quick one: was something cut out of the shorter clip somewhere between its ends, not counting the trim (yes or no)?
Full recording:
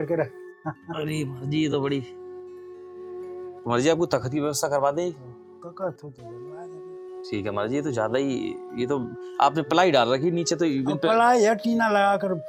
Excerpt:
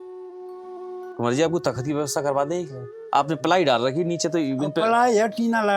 yes